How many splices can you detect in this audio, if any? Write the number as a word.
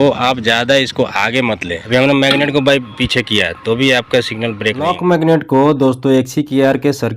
two